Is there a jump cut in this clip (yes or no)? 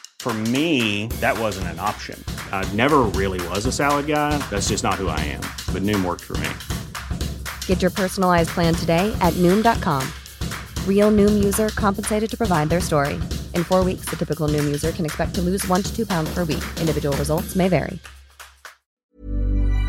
yes